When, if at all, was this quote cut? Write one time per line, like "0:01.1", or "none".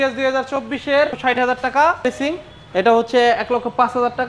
0:01.2
0:02.0